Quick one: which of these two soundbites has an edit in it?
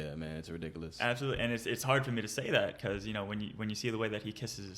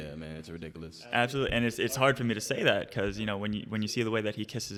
first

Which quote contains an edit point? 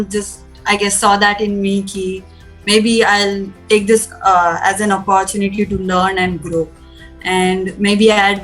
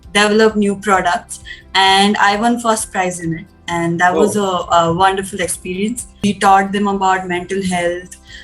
second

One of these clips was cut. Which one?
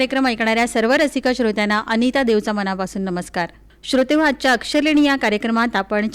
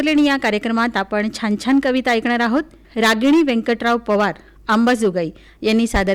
second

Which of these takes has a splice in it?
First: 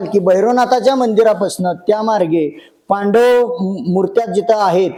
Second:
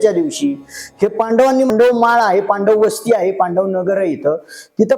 second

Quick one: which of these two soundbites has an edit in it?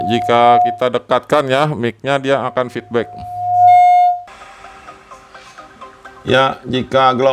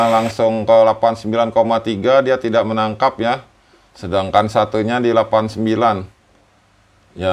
first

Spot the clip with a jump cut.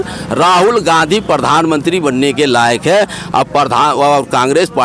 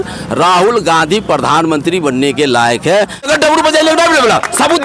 second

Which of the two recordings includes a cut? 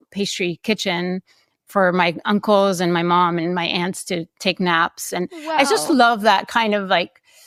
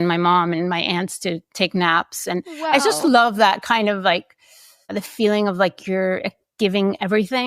second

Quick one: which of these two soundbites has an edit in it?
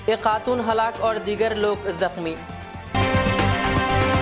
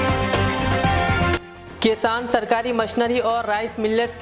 second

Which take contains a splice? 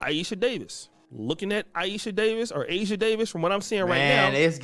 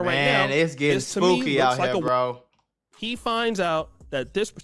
second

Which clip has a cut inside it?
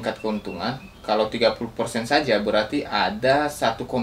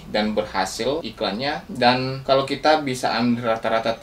second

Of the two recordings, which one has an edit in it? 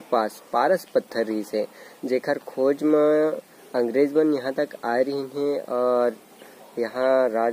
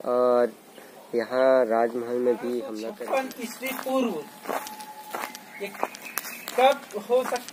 second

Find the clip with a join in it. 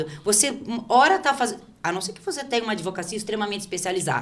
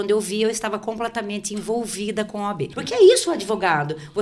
second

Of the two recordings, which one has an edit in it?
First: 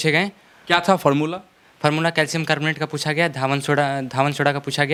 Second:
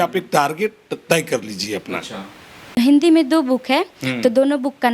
second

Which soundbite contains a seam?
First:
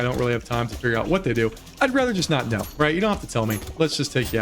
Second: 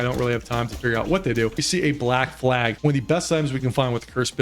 second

